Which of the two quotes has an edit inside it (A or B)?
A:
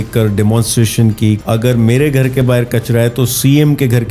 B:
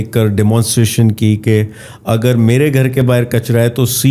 A